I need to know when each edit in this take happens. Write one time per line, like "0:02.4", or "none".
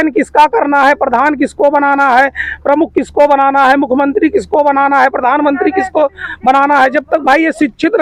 none